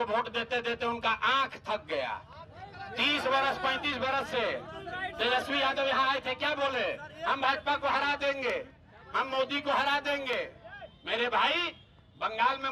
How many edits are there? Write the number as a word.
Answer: zero